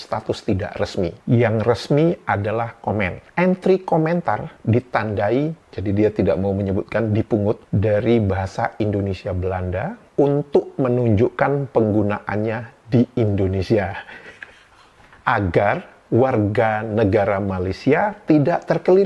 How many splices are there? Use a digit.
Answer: 1